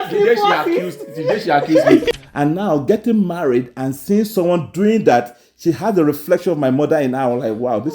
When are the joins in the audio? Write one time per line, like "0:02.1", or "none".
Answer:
0:02.1